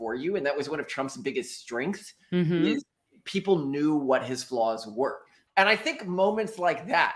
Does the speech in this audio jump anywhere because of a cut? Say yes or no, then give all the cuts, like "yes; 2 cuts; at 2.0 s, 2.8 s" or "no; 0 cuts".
yes; 1 cut; at 5.3 s